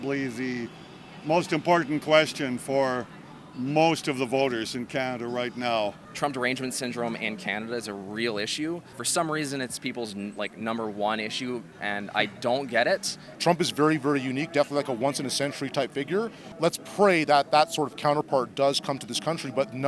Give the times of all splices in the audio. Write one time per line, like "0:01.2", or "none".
0:06.0
0:08.9
0:11.7
0:13.2
0:16.4